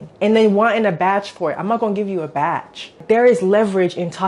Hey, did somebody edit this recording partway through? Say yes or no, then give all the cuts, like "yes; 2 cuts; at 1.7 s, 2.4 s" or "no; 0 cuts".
yes; 1 cut; at 3.0 s